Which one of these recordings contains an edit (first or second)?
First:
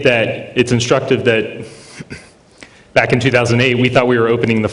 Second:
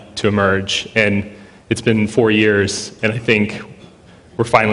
first